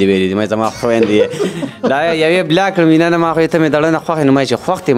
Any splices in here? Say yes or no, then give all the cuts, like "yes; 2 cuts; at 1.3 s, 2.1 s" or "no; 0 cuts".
no; 0 cuts